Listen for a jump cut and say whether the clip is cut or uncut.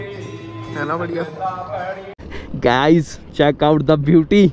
cut